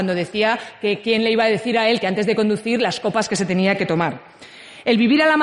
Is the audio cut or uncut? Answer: cut